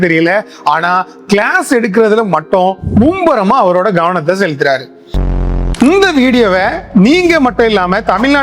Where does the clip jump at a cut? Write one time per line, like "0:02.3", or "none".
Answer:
0:05.3